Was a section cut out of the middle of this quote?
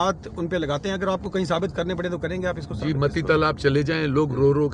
no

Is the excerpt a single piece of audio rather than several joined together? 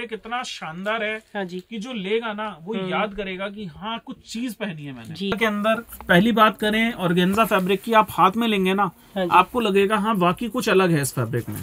no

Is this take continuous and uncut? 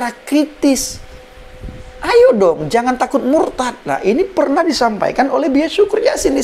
yes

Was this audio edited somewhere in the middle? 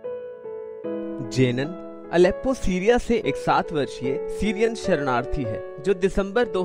yes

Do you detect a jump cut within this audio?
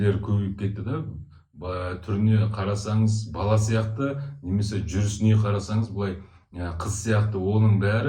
no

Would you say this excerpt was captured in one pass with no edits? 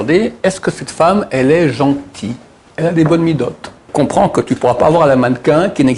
no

